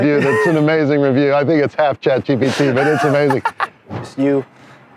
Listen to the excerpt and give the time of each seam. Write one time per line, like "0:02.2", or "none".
0:04.0